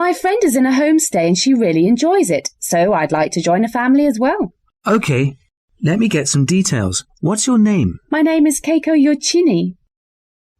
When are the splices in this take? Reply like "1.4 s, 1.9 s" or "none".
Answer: 1.4 s

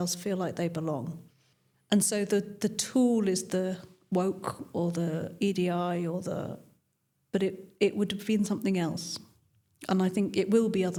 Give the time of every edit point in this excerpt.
none

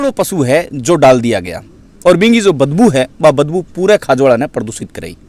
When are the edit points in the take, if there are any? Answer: none

